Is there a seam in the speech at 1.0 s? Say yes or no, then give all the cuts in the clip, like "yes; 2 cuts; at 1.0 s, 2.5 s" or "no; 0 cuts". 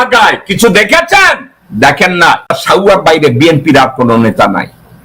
no; 1 cut; at 2.6 s